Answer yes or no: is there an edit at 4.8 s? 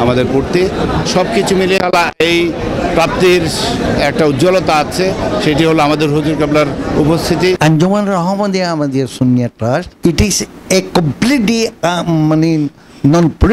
no